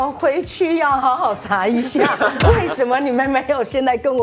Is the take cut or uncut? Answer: uncut